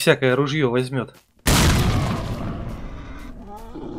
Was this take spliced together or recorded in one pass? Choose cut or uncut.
uncut